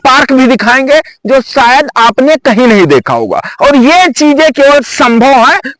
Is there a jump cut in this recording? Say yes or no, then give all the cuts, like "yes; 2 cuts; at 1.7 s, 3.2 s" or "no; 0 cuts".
no; 0 cuts